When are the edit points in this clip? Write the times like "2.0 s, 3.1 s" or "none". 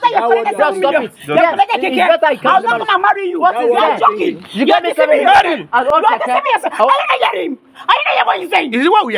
none